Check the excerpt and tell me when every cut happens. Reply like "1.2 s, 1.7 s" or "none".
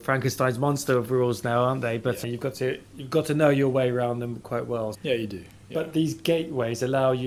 none